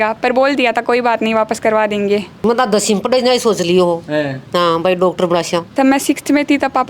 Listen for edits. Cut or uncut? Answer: cut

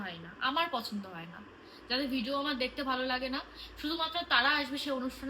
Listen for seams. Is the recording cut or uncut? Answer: uncut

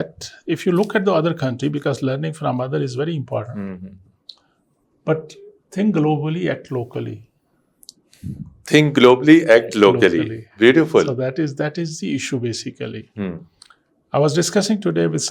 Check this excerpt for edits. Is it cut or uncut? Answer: uncut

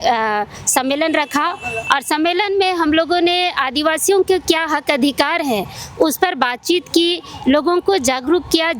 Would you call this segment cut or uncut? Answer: uncut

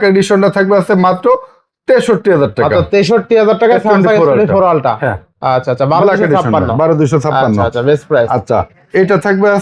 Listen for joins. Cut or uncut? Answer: uncut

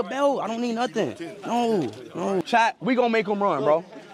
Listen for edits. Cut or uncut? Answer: cut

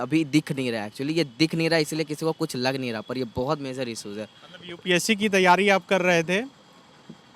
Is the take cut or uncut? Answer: uncut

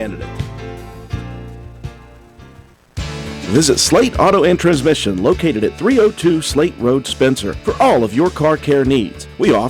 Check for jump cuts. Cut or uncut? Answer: cut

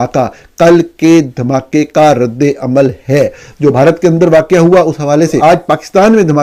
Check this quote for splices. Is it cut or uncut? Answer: cut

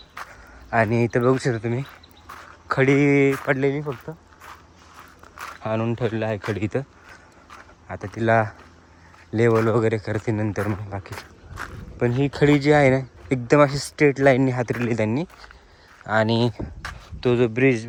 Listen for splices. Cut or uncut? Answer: uncut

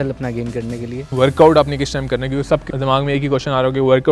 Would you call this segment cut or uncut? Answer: cut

